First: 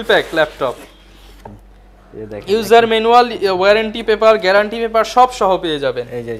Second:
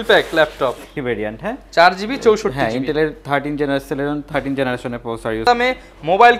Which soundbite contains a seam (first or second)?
second